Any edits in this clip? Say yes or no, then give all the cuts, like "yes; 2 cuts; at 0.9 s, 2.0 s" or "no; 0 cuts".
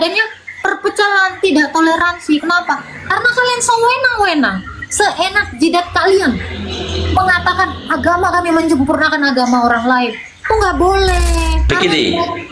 yes; 1 cut; at 11.6 s